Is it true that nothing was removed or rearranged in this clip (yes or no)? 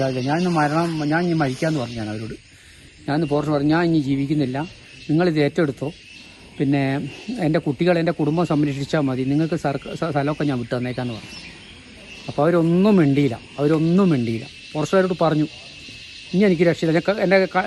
yes